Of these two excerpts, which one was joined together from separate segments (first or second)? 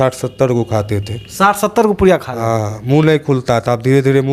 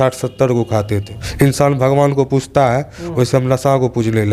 second